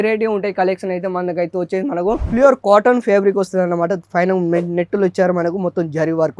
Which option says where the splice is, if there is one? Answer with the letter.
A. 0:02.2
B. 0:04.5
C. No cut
A